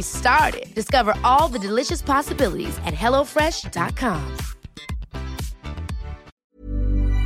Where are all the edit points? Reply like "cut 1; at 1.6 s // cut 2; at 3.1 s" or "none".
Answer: cut 1; at 6.3 s